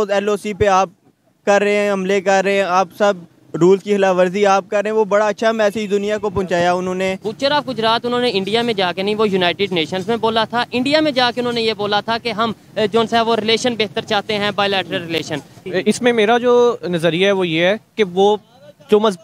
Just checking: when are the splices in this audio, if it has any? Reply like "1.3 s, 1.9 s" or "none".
7.3 s, 15.6 s